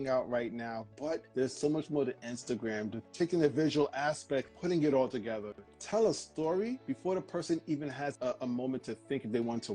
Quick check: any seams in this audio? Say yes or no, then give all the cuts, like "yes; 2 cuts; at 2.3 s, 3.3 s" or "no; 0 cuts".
yes; 3 cuts; at 1.3 s, 3.0 s, 4.5 s